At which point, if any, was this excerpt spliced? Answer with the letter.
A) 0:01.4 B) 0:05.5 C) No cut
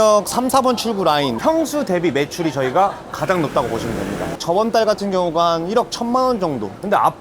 A